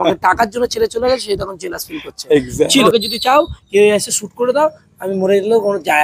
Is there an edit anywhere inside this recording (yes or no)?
yes